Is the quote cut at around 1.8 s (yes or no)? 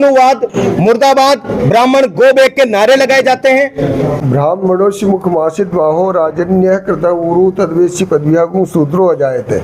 no